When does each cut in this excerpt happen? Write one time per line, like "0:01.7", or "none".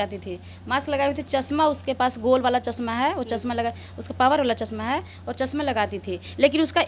none